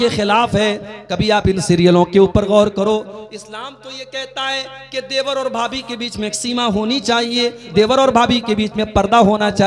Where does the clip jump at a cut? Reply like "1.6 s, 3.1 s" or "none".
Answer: 7.6 s